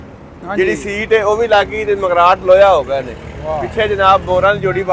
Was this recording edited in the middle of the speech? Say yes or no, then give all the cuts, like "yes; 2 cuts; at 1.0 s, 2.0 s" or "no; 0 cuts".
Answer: no; 0 cuts